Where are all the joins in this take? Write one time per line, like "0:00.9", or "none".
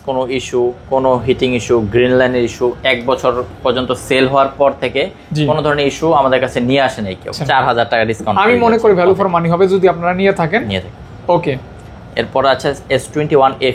0:07.3